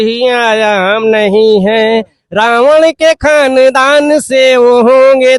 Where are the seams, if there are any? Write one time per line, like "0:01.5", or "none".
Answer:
none

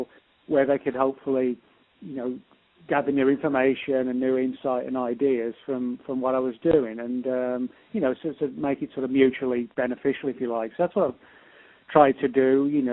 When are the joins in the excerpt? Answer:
0:02.5

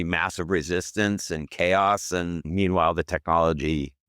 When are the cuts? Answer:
0:02.4

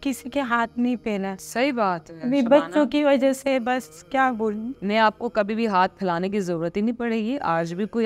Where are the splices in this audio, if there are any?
none

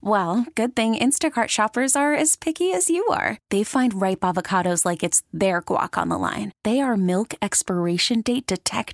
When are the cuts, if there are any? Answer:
none

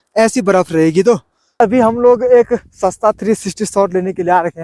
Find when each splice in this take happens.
0:01.6

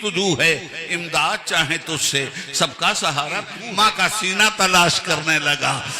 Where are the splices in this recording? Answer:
0:03.6

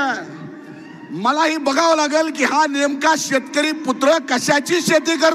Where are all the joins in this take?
none

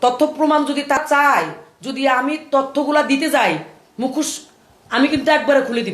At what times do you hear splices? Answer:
0:01.0

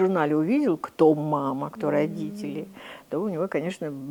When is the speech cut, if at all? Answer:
none

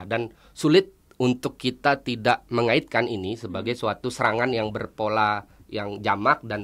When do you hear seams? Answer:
none

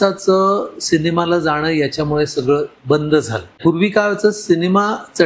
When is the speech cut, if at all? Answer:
0:03.6

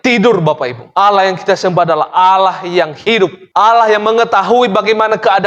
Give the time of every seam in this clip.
0:03.4

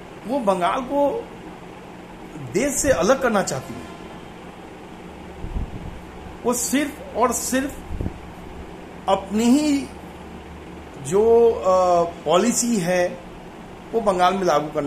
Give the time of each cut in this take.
none

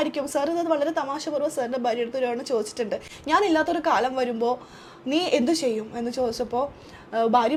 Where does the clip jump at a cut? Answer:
none

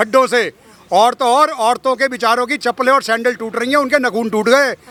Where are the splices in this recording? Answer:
none

